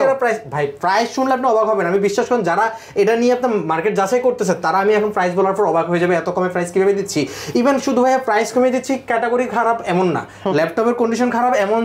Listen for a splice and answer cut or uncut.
uncut